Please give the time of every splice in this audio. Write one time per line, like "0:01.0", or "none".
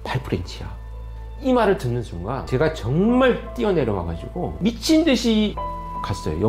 0:02.4
0:04.4
0:05.6